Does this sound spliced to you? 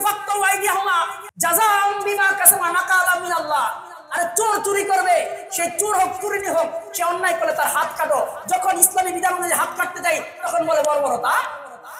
yes; 1 cut; at 1.2 s

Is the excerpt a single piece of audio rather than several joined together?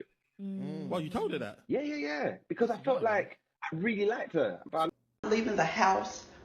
no; 1 cut; at 4.7 s

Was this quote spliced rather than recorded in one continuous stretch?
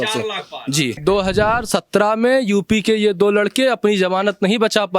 yes; 1 cut; at 1.0 s

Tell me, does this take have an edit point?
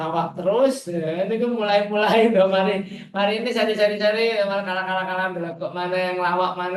no; 0 cuts

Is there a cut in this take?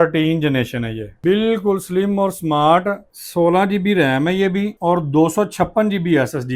no; 0 cuts

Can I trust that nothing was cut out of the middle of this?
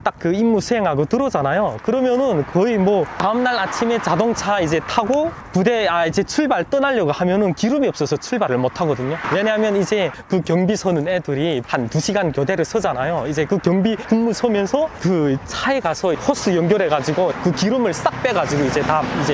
no; 5 cuts; at 3.2 s, 5.4 s, 9.2 s, 16.2 s, 17.3 s

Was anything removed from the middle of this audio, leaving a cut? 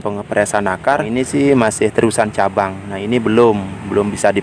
yes; 1 cut; at 1.1 s

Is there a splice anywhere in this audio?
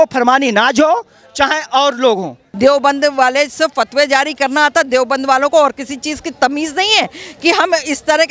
yes; 1 cut; at 2.4 s

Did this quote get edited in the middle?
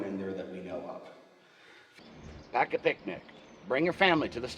yes; 1 cut; at 1.9 s

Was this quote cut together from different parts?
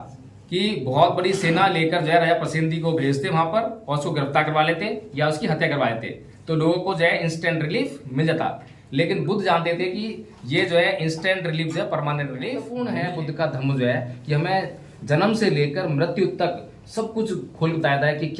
yes; 1 cut; at 12.7 s

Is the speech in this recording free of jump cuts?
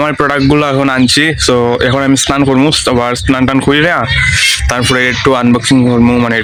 yes; 0 cuts

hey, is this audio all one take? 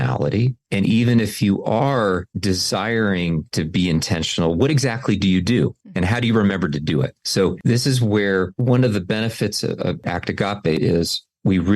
no; 1 cut; at 10.8 s

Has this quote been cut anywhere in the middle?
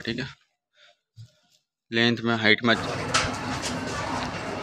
yes; 1 cut; at 2.8 s

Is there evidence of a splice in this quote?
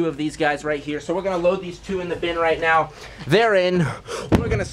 no; 0 cuts

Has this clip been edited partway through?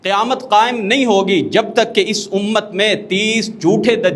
no; 0 cuts

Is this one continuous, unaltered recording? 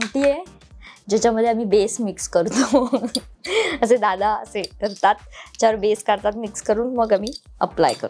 yes; 0 cuts

